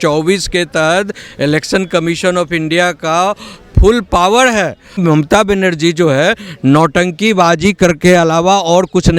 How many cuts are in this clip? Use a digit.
1